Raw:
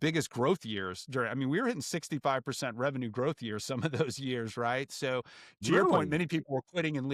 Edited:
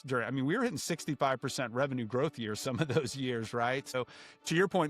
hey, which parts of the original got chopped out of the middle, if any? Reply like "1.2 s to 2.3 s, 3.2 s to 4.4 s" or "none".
5.0 s to 5.1 s